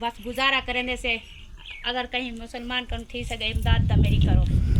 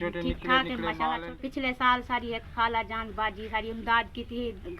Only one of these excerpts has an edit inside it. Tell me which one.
second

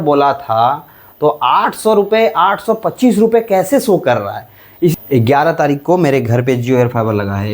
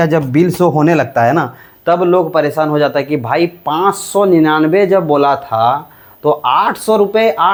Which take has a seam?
first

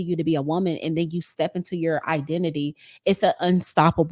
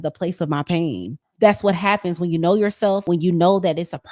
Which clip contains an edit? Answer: second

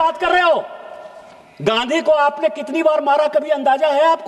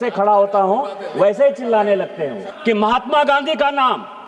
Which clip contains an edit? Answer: second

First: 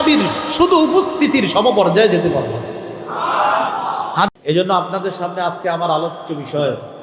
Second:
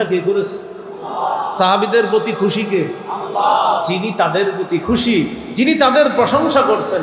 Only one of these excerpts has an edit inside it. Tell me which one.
first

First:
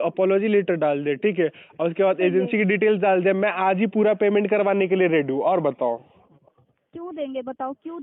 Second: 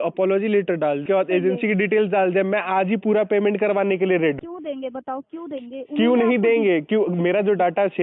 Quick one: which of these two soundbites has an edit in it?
second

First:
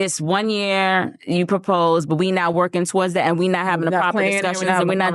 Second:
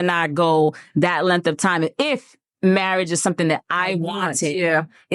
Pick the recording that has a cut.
first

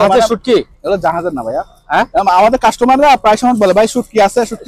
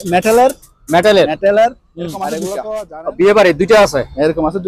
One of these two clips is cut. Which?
second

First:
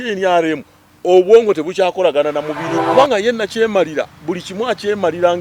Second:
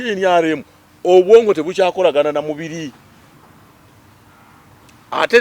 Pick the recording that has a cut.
first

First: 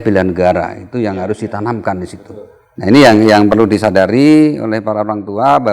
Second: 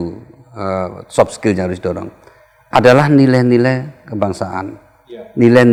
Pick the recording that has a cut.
first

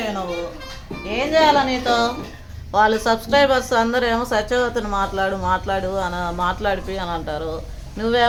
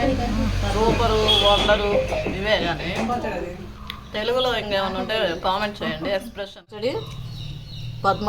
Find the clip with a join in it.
second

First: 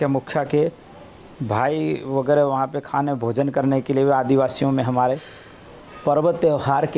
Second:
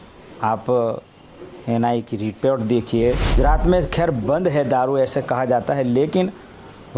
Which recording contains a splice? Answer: second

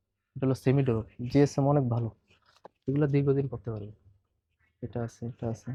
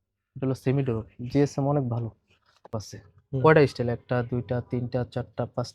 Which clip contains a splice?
second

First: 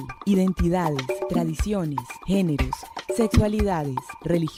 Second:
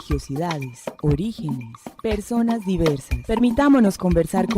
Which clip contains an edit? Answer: second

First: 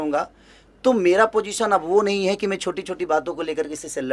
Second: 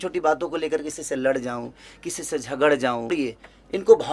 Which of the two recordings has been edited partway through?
second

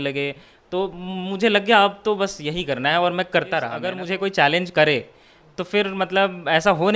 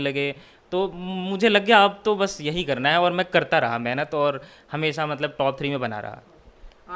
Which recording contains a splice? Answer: first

